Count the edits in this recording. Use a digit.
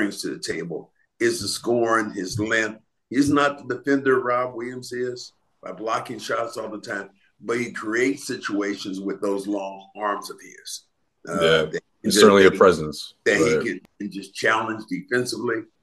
1